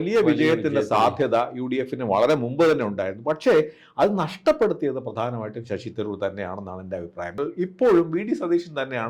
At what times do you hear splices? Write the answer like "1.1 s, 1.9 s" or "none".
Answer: 7.4 s